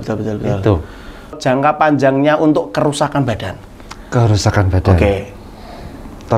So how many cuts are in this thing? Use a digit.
1